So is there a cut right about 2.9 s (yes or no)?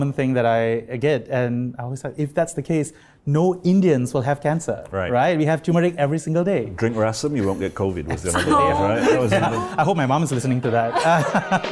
no